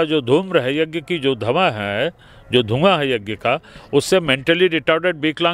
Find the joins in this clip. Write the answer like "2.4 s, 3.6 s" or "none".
none